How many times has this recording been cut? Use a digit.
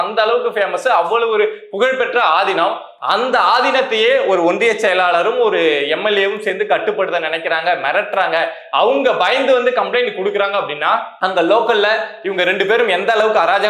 1